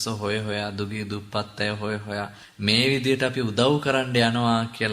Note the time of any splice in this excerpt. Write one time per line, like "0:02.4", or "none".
0:02.4